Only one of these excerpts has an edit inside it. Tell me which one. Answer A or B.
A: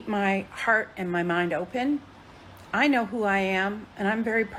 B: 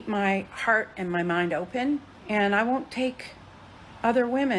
B